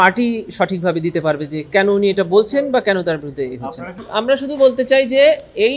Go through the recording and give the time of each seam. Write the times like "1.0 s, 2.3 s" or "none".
3.9 s